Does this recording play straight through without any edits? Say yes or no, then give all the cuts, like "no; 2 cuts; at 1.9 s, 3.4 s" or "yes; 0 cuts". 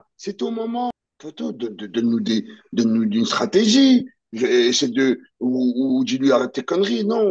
no; 1 cut; at 0.9 s